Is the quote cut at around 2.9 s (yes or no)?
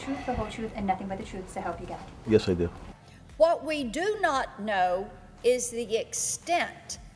yes